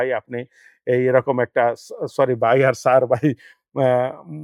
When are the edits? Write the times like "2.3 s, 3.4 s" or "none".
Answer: none